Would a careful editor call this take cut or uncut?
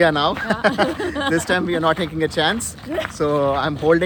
uncut